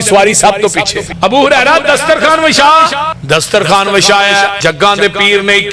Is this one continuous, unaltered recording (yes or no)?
no